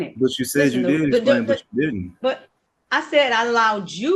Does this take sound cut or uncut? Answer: uncut